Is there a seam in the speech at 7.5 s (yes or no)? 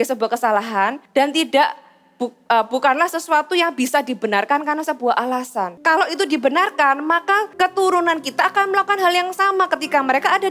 yes